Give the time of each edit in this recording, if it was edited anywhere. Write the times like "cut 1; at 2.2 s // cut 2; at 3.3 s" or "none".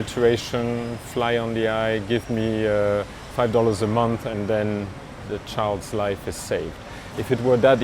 cut 1; at 3.2 s // cut 2; at 5.2 s